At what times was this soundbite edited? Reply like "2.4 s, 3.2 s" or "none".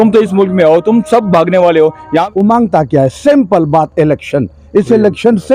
2.2 s